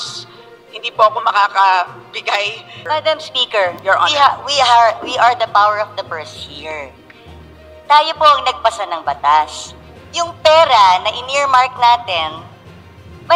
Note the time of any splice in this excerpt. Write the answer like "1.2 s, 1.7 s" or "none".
2.7 s